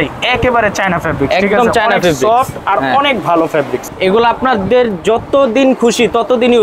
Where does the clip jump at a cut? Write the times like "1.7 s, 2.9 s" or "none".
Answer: 3.9 s